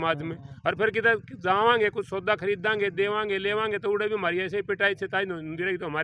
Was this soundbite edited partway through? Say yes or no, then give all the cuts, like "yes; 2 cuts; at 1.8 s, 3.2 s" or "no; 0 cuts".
no; 0 cuts